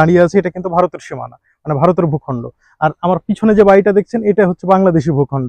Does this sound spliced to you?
no; 0 cuts

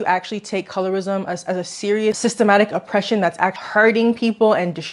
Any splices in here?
yes; 1 cut; at 3.6 s

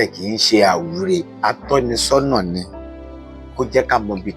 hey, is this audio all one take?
no; 1 cut; at 1.3 s

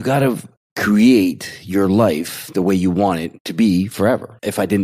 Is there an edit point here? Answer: no; 0 cuts

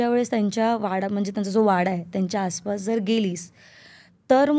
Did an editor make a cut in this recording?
no; 0 cuts

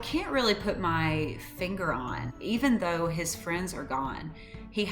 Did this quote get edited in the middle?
yes; 1 cut; at 2.3 s

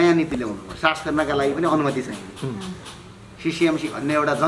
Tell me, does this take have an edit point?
no; 0 cuts

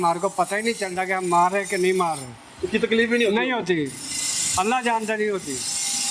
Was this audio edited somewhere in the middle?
no; 0 cuts

